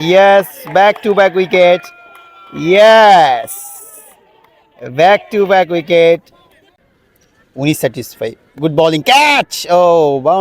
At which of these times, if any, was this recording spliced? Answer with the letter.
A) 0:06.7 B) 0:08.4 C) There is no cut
A